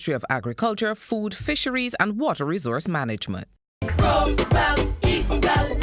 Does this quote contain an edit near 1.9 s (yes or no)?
no